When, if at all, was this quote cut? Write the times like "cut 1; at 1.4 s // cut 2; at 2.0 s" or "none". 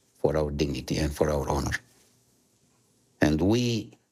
none

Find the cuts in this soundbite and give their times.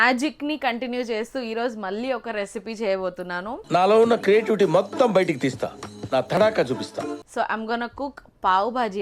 cut 1; at 3.5 s // cut 2; at 7.2 s

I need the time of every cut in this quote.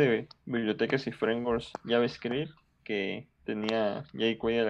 cut 1; at 1.7 s

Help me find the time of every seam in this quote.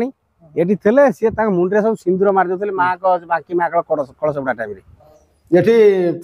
cut 1; at 5.2 s

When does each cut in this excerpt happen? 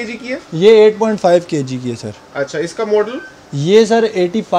none

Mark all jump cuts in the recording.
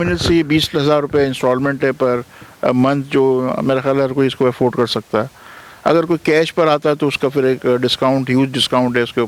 none

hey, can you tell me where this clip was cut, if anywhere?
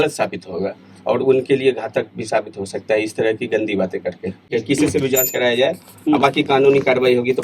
cut 1; at 4.5 s

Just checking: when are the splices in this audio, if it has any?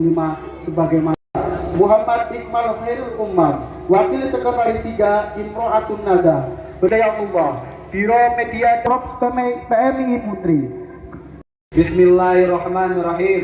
cut 1; at 1.1 s // cut 2; at 6.9 s // cut 3; at 11.2 s

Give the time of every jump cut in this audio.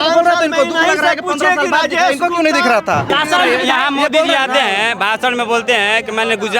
cut 1; at 3.1 s

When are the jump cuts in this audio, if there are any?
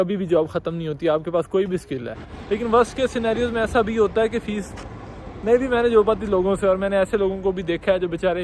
cut 1; at 2.3 s

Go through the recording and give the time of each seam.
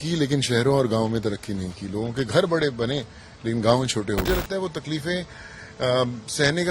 cut 1; at 4.2 s

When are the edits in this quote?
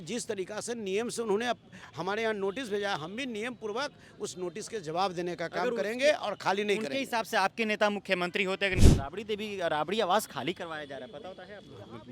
cut 1; at 8.8 s

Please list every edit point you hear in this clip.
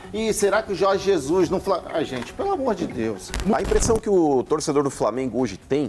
cut 1; at 3.5 s

